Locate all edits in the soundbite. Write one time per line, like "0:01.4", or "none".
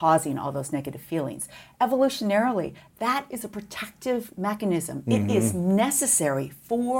none